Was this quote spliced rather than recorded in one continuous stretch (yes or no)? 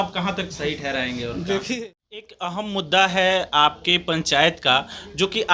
yes